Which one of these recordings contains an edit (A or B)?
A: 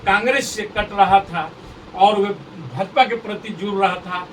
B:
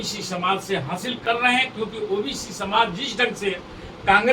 B